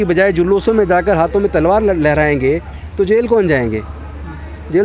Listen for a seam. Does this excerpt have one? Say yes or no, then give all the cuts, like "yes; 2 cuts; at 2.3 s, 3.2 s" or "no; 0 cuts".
no; 0 cuts